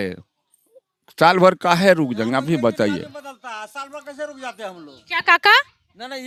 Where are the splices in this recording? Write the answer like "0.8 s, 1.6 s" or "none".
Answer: none